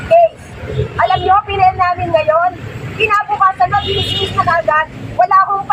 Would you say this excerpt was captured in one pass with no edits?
yes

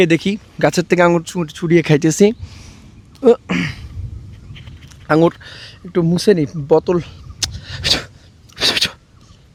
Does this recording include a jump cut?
no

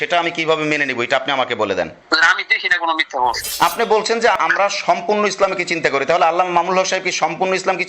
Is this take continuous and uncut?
no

